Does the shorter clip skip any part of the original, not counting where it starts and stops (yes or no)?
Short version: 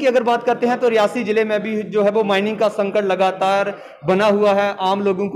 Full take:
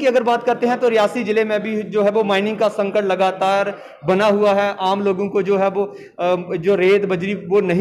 no